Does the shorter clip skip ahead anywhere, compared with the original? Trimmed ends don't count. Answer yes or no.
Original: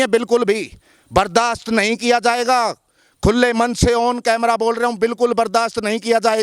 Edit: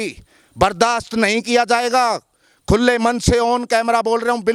no